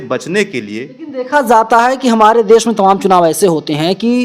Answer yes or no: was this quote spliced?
yes